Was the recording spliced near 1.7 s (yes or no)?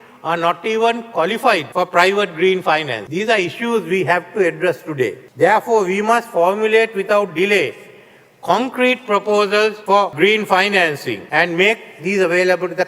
yes